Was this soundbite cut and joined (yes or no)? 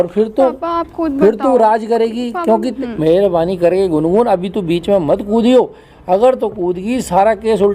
yes